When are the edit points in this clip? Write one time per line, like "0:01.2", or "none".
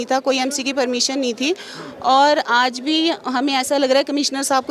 none